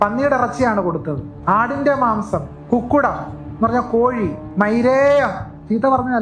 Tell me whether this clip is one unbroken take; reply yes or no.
no